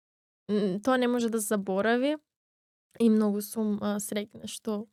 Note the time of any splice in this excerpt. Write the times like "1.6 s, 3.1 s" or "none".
none